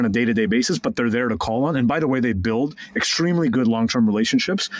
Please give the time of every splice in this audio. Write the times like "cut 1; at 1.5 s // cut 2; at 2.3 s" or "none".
none